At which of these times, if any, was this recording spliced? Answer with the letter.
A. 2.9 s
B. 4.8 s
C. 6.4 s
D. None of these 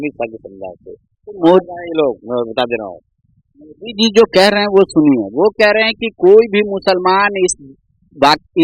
D